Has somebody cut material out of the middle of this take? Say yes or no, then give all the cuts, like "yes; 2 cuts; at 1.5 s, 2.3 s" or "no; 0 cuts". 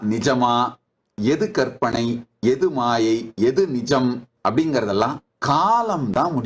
yes; 2 cuts; at 4.3 s, 5.3 s